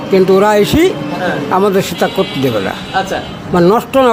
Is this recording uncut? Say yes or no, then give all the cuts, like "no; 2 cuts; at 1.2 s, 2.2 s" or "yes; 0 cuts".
yes; 0 cuts